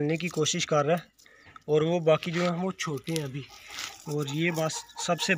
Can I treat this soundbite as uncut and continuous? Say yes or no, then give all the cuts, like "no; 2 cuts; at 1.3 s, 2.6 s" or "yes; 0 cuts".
yes; 0 cuts